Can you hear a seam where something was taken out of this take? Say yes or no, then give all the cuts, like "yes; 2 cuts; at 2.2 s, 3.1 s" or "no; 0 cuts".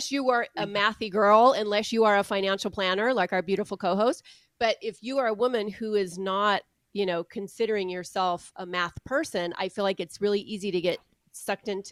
no; 0 cuts